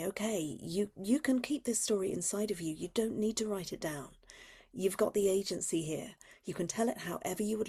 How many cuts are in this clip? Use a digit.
0